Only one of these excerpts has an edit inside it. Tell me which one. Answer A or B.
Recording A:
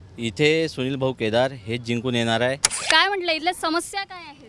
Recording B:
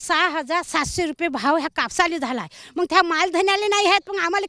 A